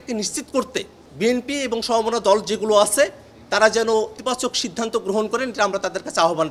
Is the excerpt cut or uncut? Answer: cut